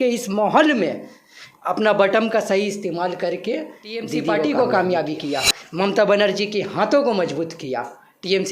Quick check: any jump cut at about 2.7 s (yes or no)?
no